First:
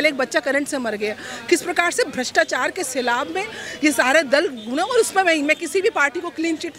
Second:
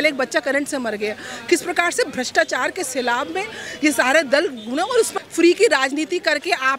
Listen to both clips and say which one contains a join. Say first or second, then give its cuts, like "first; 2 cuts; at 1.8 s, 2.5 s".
second; 1 cut; at 5.1 s